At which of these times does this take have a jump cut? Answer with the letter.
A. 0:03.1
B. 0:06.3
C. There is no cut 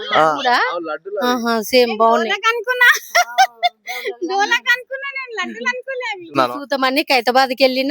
B